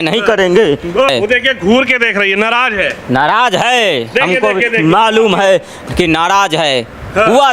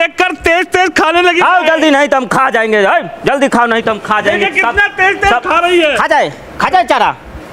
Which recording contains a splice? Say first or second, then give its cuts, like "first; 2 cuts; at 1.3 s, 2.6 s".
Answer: first; 1 cut; at 1.1 s